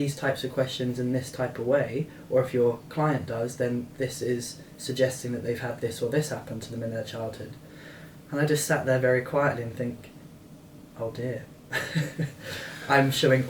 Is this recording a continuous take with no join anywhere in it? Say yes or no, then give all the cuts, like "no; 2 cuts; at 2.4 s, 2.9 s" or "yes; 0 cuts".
yes; 0 cuts